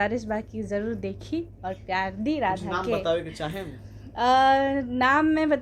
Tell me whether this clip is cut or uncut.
uncut